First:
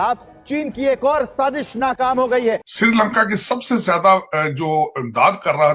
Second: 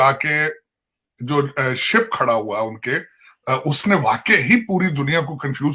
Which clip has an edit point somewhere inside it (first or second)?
first